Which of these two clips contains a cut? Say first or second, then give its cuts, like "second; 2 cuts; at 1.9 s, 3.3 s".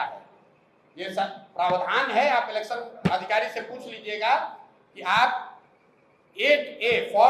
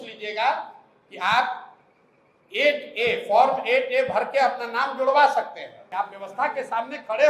second; 1 cut; at 5.9 s